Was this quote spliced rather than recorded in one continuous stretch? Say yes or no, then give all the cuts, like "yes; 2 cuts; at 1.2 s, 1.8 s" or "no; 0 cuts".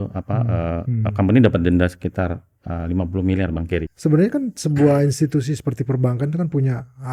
yes; 1 cut; at 3.9 s